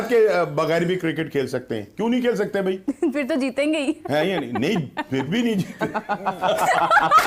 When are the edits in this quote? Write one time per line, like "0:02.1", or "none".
none